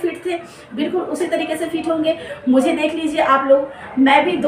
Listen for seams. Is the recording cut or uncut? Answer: uncut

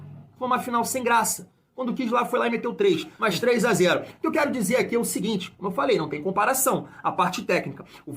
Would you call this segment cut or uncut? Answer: cut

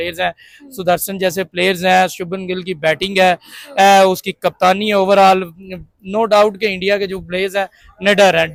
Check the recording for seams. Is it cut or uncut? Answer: uncut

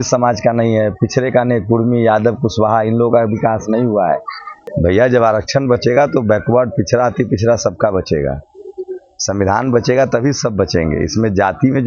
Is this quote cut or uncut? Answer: cut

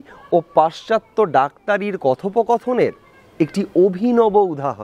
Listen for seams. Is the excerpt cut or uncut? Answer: uncut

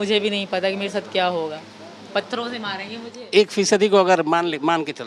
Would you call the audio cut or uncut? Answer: uncut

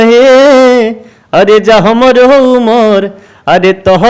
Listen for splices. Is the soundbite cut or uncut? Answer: uncut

